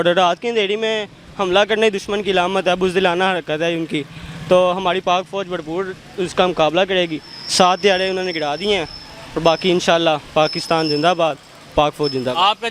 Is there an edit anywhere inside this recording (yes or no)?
no